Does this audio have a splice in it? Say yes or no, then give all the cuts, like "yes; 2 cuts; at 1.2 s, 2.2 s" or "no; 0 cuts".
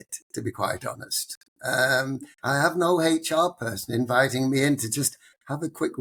no; 0 cuts